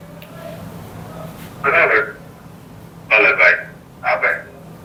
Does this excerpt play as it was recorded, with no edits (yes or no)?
yes